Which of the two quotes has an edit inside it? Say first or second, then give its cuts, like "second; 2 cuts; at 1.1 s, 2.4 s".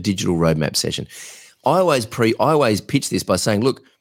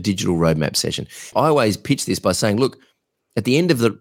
second; 1 cut; at 1.3 s